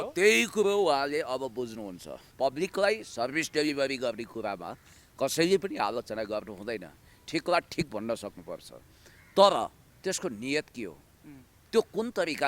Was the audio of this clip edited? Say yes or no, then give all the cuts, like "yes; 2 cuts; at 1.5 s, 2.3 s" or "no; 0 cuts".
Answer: yes; 1 cut; at 2.2 s